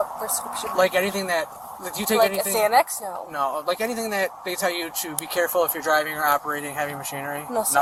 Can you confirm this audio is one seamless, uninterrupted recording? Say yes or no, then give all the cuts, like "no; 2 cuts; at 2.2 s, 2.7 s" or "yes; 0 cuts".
yes; 0 cuts